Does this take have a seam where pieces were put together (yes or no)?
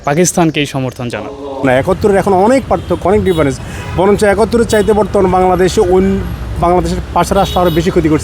yes